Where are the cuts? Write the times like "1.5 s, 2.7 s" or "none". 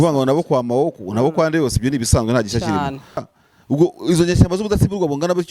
3.3 s